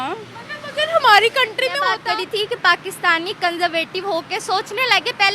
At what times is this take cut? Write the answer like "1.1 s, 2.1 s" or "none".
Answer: 1.9 s